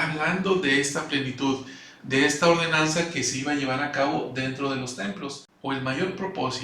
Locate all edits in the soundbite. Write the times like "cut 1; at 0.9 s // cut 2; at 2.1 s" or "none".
cut 1; at 5.5 s